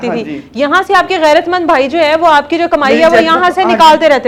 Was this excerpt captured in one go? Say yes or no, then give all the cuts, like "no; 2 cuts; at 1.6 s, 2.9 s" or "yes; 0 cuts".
yes; 0 cuts